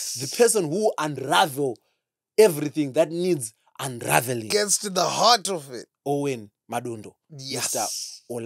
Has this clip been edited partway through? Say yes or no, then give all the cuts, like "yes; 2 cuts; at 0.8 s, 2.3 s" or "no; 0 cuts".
no; 0 cuts